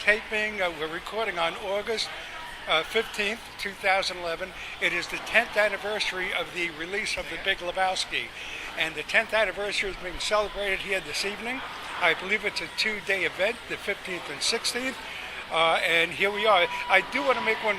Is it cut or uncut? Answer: cut